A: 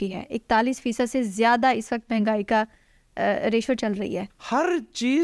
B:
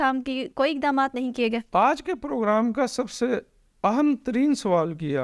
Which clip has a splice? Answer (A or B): A